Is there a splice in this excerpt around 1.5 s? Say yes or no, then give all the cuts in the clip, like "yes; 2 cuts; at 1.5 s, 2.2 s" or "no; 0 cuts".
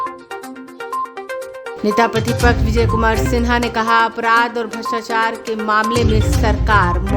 yes; 1 cut; at 1.5 s